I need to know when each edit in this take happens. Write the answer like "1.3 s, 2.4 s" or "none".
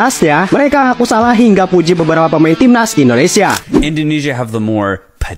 3.6 s